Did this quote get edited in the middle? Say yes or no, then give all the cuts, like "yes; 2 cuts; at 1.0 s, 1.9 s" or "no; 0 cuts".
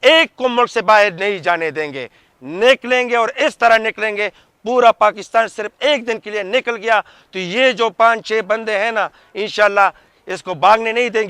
no; 0 cuts